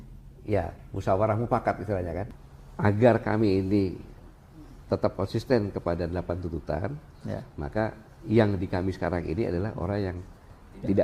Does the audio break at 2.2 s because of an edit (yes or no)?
yes